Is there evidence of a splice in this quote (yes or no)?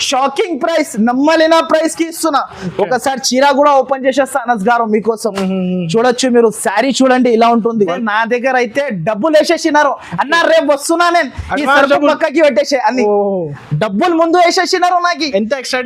yes